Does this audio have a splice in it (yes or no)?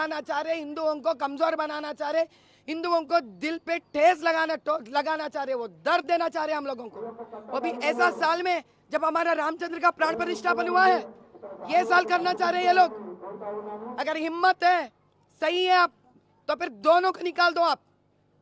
no